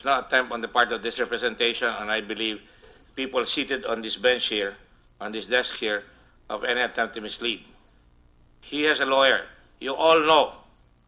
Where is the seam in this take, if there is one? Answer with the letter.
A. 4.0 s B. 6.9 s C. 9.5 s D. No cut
A